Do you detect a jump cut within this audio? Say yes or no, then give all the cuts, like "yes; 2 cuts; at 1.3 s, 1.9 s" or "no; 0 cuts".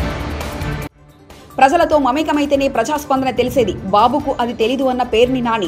yes; 1 cut; at 0.9 s